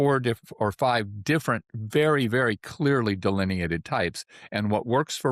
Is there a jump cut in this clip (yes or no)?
no